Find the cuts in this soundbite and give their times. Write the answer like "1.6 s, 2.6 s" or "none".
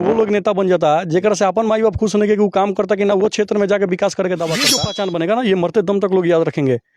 4.8 s